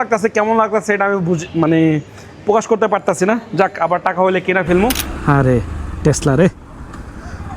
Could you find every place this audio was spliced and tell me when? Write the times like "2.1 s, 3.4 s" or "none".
5.1 s